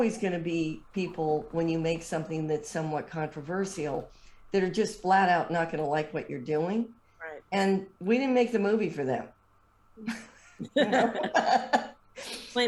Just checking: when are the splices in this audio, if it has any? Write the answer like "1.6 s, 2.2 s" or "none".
none